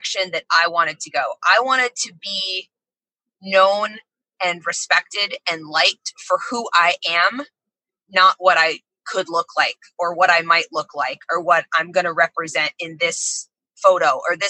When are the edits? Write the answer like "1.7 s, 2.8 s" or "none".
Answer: none